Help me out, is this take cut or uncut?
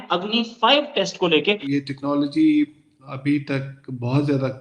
cut